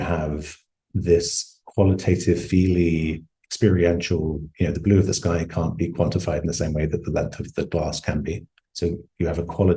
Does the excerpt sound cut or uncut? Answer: uncut